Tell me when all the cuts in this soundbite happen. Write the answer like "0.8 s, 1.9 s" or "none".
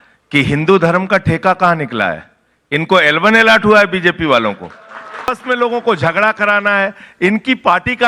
5.3 s